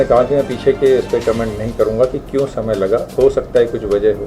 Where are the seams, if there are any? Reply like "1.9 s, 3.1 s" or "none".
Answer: none